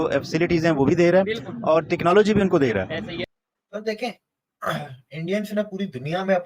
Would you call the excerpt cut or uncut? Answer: cut